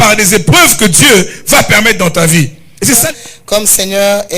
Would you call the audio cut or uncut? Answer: cut